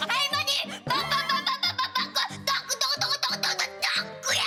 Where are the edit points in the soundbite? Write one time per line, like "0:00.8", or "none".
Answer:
none